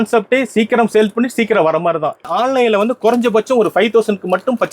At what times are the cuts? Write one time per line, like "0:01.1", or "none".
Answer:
0:02.3